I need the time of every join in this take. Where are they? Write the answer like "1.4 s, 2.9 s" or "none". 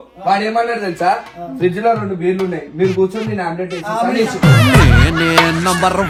none